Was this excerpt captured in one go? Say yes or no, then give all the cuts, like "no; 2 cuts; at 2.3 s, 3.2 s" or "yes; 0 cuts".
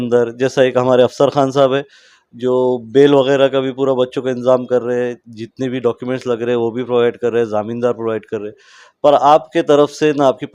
yes; 0 cuts